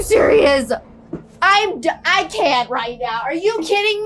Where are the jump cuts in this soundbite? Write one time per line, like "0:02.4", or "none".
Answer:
none